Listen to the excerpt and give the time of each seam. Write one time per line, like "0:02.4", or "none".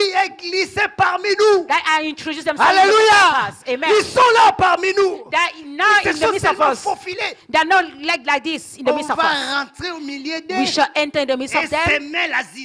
none

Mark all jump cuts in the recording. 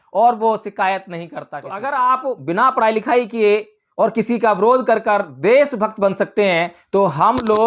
0:01.6

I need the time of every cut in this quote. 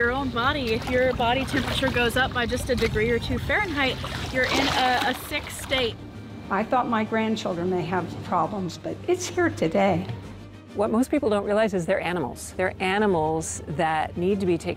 0:06.1
0:10.1
0:12.4

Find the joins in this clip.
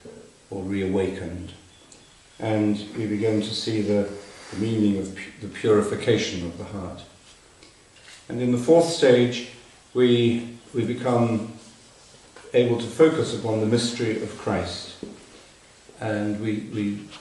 0:12.9

